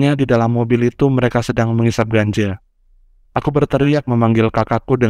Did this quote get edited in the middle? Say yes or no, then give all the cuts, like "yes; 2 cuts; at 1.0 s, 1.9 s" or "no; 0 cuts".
no; 0 cuts